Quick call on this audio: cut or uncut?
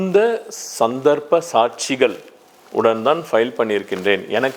uncut